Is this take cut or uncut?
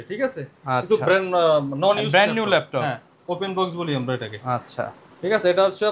uncut